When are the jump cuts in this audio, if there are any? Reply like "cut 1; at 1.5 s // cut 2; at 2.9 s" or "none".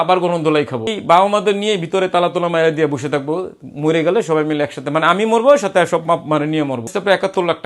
cut 1; at 0.9 s // cut 2; at 6.9 s